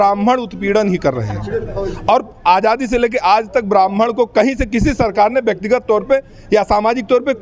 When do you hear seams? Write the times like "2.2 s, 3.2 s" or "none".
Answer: none